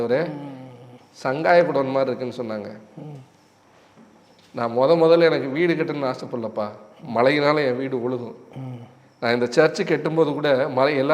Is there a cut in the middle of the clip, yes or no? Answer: no